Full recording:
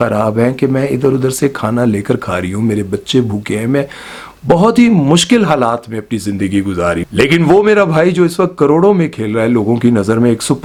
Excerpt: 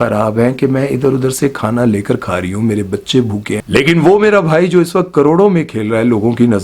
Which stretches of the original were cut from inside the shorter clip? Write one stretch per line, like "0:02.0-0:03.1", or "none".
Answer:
0:03.6-0:07.1

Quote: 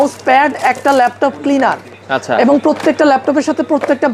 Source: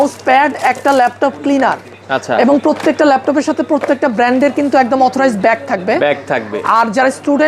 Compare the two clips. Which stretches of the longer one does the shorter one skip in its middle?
none

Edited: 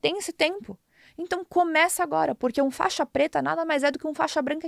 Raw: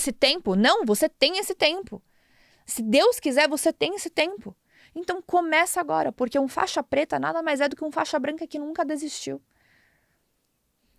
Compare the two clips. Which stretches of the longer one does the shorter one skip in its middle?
none

